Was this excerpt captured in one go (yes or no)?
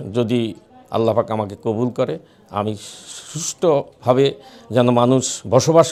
yes